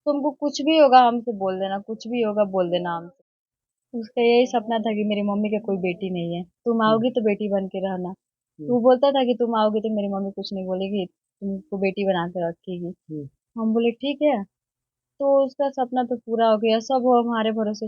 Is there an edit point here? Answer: yes; 1 cut; at 3.1 s

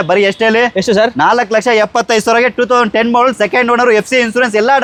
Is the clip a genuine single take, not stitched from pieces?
yes; 0 cuts

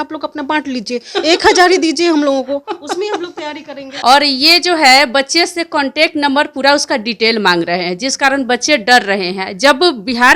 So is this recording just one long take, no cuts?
no; 1 cut; at 3.9 s

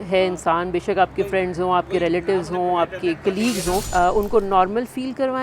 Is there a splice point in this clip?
yes; 1 cut; at 3.9 s

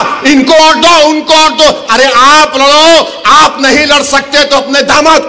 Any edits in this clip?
no; 0 cuts

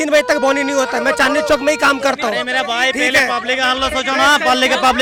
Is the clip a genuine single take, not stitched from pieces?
yes; 0 cuts

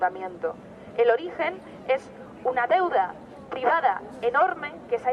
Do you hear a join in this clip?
no; 0 cuts

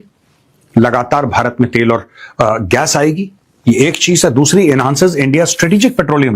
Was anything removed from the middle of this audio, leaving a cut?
no; 0 cuts

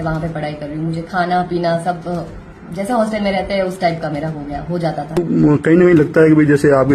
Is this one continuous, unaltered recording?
no; 1 cut; at 5.1 s

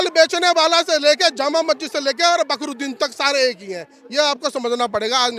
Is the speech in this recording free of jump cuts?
yes; 0 cuts

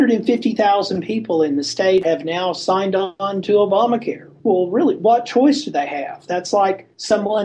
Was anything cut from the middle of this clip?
yes; 1 cut; at 2.0 s

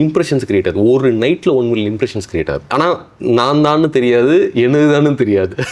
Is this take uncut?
no; 1 cut; at 2.7 s

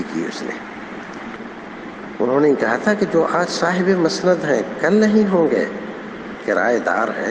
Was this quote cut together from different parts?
yes; 1 cut; at 1.3 s

